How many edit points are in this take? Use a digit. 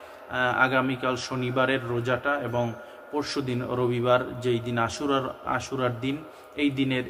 0